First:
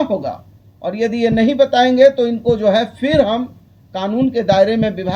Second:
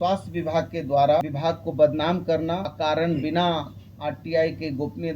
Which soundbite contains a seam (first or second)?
second